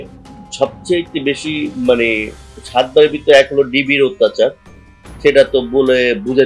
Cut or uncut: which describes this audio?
uncut